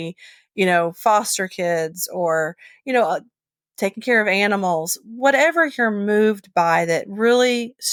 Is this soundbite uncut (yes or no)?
yes